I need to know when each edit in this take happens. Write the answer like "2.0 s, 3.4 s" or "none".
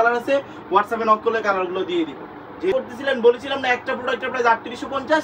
2.7 s

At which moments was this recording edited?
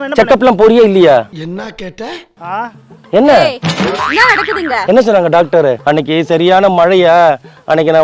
5.8 s

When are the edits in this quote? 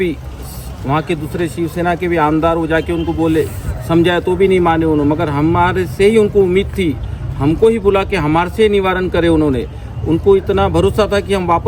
none

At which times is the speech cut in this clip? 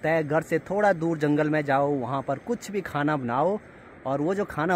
none

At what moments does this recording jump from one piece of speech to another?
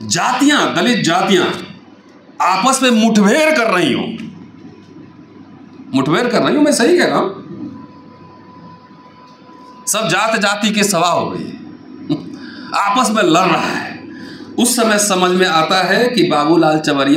none

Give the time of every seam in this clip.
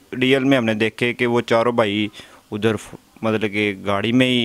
none

